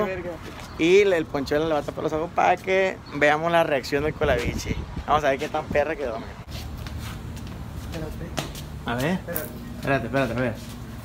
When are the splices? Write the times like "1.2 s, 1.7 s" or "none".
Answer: 6.9 s